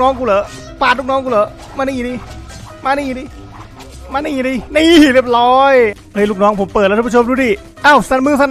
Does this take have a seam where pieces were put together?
yes; 1 cut; at 5.9 s

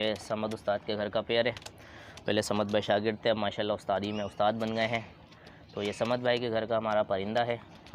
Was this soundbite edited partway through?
no; 0 cuts

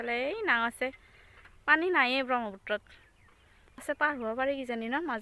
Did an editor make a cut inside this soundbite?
no; 0 cuts

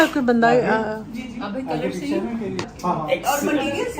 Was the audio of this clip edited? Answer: yes; 1 cut; at 2.6 s

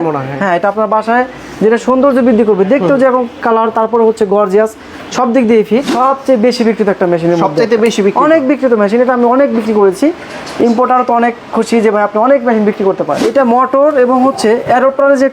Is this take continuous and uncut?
no; 2 cuts; at 5.9 s, 13.1 s

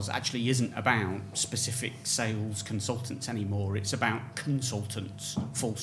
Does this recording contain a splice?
no; 0 cuts

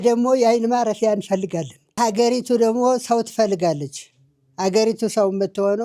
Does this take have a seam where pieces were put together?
yes; 1 cut; at 1.8 s

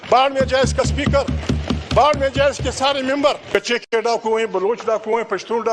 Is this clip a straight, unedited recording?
no; 1 cut; at 3.4 s

